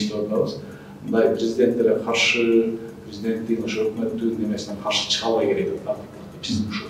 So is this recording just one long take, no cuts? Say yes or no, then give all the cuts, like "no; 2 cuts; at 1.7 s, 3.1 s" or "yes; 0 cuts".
yes; 0 cuts